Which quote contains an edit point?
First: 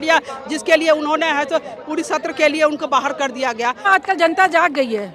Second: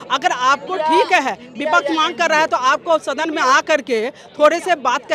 first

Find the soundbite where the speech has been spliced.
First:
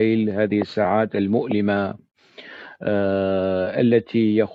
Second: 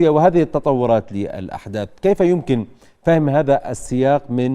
second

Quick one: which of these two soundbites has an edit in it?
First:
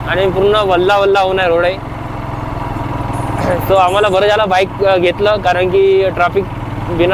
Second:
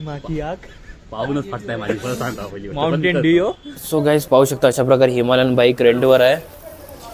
second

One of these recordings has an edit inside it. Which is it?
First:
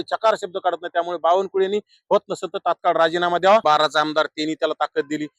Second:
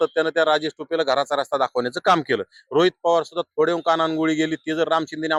first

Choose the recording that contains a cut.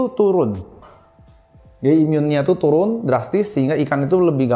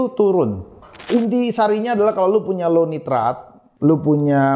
second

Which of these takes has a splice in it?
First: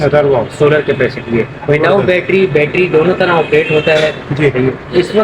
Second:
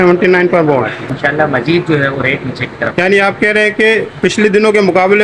second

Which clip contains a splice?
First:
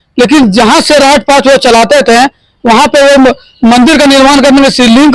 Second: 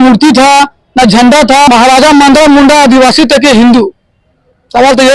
second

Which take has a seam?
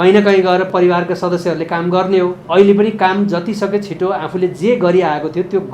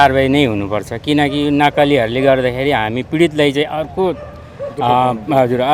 first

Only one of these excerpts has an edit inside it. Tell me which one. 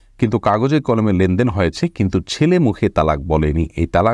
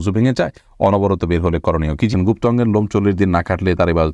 second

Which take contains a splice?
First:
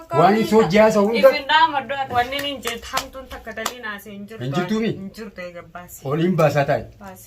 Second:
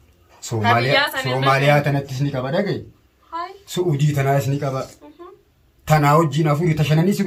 first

